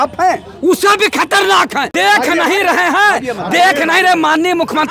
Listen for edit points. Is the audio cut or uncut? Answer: cut